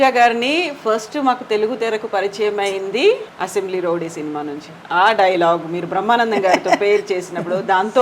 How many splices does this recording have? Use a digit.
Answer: 1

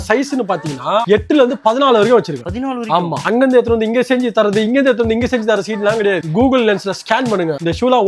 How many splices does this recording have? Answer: 1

